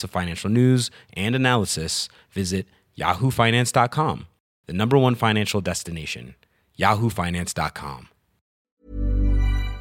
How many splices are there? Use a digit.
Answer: 1